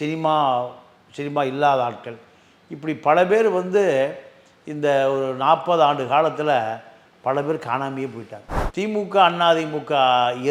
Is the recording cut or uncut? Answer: cut